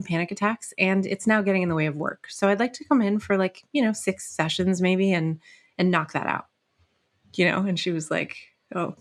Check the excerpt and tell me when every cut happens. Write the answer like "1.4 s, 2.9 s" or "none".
none